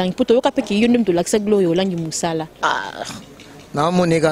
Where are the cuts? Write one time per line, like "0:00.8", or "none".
0:02.5